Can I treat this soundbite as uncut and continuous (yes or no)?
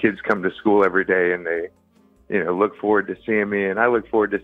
yes